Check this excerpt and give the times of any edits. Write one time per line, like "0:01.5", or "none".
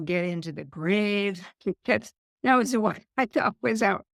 none